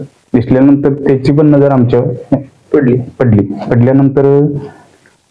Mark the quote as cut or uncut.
uncut